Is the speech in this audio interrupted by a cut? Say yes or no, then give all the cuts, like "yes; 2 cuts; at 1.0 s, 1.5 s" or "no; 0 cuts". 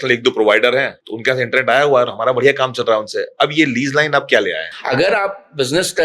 yes; 2 cuts; at 0.9 s, 4.7 s